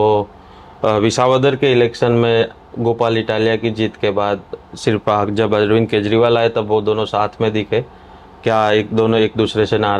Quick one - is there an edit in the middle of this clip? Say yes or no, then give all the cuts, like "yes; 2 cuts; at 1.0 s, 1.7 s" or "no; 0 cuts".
no; 0 cuts